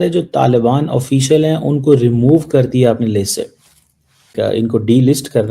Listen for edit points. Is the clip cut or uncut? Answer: cut